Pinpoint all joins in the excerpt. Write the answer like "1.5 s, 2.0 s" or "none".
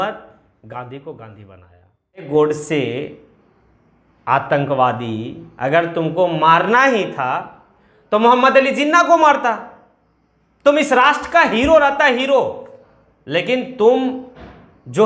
2.3 s